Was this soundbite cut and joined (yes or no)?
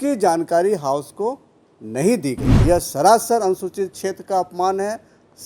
yes